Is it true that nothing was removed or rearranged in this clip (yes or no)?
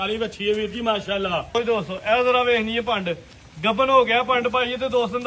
no